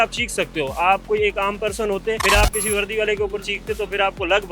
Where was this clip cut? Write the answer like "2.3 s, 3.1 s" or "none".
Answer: 2.2 s